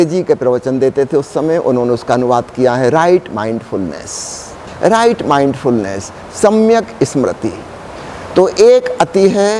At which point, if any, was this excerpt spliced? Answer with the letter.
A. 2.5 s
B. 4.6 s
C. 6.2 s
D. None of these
B